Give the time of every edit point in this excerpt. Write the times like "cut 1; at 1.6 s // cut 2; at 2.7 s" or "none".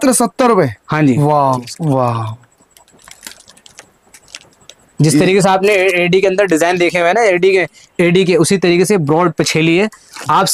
cut 1; at 1.6 s